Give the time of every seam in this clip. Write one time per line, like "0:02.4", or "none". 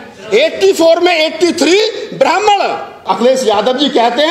0:03.0

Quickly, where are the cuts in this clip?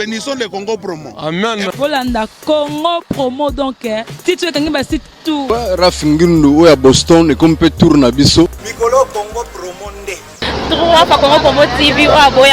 0:05.4
0:08.6

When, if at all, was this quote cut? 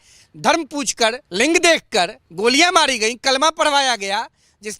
0:01.2
0:02.2

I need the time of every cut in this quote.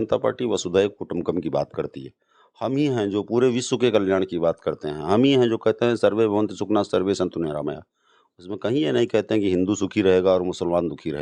none

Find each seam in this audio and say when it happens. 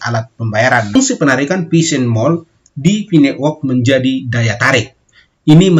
0:00.9

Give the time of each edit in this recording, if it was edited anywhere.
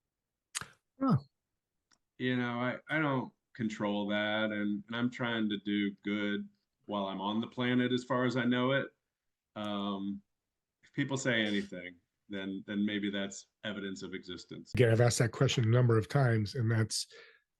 0:14.7

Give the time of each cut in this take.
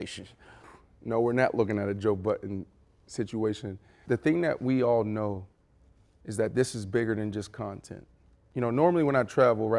0:04.0
0:08.3

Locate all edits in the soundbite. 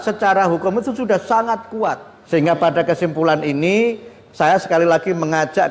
0:02.1

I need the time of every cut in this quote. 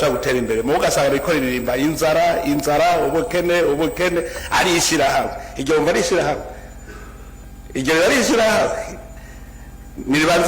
0:05.7

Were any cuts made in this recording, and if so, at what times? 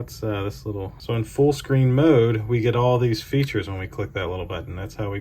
0:01.0

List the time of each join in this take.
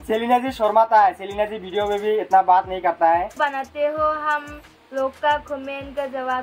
0:03.3

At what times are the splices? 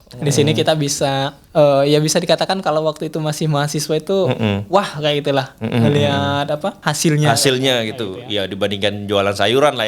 0:01.4
0:06.9

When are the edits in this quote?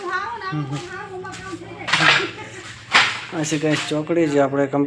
none

